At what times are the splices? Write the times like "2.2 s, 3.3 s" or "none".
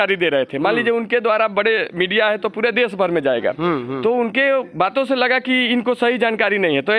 none